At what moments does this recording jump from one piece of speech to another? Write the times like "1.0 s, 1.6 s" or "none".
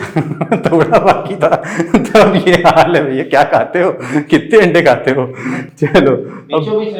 none